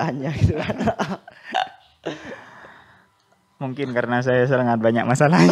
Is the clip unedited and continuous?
yes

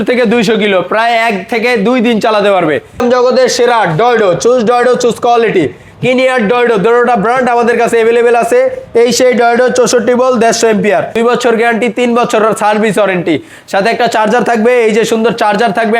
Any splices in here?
yes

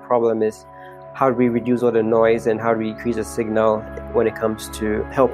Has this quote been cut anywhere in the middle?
no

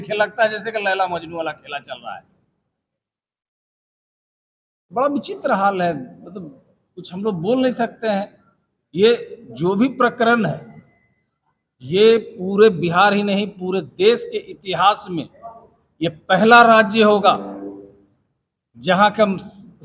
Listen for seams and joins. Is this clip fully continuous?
yes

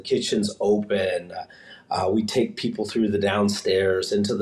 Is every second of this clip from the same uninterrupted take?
yes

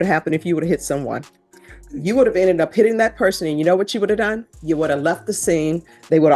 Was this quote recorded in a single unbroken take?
yes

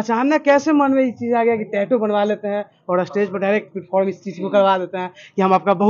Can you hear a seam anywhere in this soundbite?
no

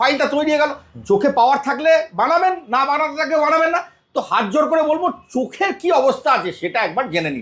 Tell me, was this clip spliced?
no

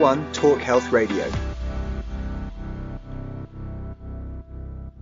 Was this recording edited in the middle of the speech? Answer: yes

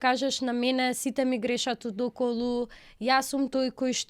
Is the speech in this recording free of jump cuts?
yes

